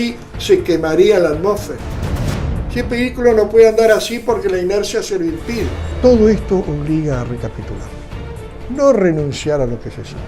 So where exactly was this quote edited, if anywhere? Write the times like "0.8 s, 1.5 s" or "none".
5.9 s